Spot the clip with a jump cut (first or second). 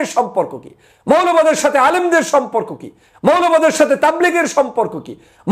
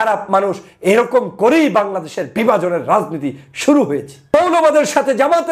second